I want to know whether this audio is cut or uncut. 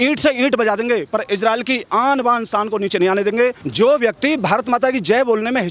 cut